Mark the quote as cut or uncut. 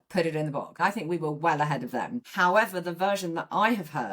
cut